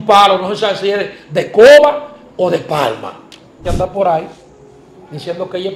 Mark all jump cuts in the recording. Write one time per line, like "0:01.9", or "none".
0:03.6